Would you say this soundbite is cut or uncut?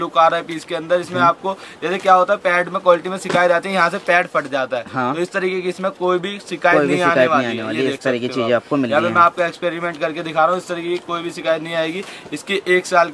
uncut